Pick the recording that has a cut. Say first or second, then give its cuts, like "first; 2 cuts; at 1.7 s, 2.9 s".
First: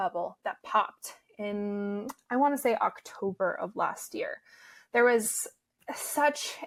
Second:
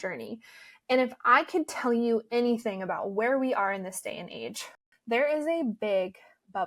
second; 1 cut; at 4.7 s